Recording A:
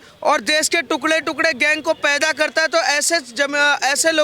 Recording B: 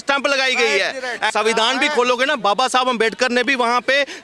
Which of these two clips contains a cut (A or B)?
B